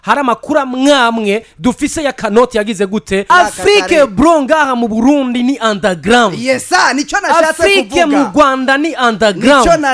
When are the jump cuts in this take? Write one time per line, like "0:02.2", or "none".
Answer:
0:03.2